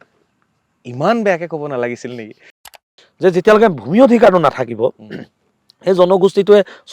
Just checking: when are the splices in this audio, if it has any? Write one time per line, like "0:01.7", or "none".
0:02.6